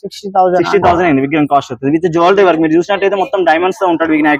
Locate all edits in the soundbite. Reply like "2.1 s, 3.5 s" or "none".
none